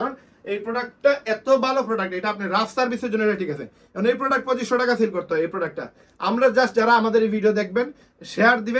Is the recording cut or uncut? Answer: uncut